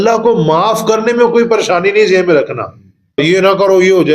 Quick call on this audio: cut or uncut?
cut